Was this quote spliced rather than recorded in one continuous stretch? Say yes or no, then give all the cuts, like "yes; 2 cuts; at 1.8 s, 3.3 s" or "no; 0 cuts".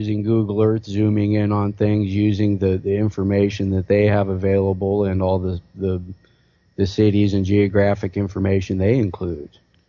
yes; 1 cut; at 6.7 s